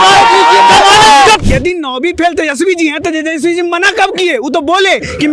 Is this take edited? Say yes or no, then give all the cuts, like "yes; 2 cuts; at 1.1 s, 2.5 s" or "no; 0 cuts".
yes; 1 cut; at 1.4 s